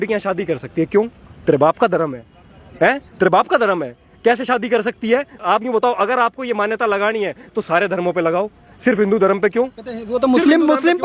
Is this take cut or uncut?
uncut